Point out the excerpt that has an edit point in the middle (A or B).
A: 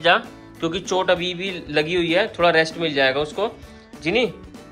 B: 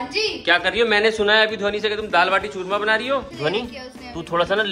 B